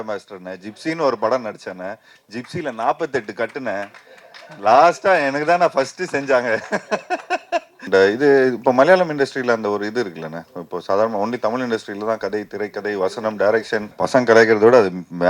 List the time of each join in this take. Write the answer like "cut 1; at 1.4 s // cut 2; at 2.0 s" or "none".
cut 1; at 7.8 s // cut 2; at 13.9 s